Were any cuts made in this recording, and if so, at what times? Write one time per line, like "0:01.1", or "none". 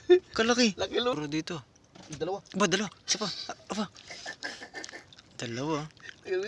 0:01.2